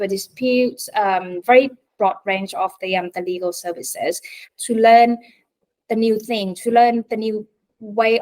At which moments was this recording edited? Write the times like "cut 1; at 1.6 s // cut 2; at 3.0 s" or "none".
cut 1; at 4.4 s